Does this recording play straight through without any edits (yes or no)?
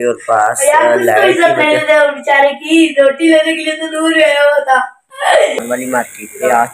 no